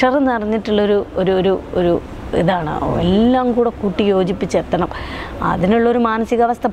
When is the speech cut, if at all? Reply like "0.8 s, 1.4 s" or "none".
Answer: none